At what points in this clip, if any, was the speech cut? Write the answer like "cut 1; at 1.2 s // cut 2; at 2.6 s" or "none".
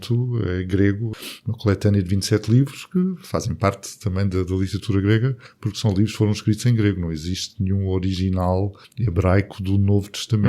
cut 1; at 1.0 s